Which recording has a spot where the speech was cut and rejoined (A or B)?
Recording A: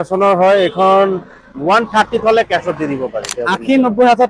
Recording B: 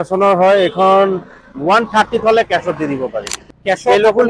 A